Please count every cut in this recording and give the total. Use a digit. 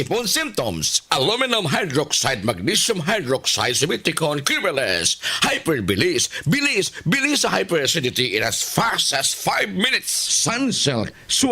2